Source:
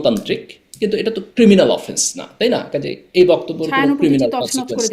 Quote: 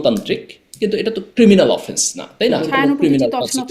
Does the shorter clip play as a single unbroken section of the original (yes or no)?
no